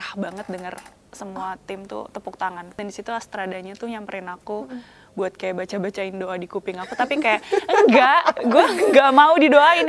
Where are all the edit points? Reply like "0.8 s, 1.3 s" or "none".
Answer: 2.8 s